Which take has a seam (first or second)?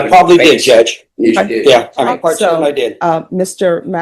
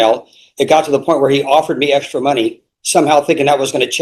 first